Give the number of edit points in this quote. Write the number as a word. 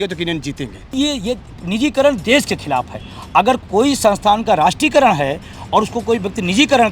one